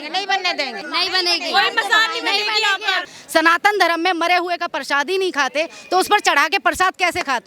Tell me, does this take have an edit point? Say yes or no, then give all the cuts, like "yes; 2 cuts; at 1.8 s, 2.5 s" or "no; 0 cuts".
yes; 2 cuts; at 0.8 s, 3.1 s